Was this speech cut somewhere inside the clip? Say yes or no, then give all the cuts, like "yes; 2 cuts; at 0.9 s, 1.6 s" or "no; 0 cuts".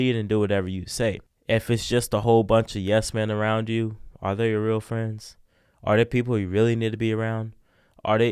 yes; 1 cut; at 1.3 s